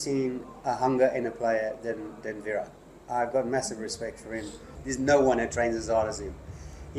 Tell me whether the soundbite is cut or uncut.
cut